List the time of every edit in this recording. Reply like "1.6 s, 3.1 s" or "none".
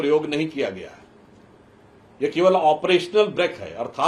none